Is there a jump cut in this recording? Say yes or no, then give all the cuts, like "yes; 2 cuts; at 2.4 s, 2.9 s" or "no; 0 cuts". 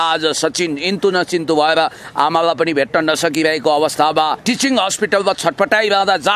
yes; 1 cut; at 4.8 s